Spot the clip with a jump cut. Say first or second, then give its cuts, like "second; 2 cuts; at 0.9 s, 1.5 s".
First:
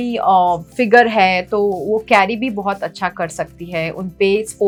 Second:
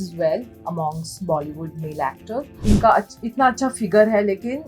second; 1 cut; at 2.6 s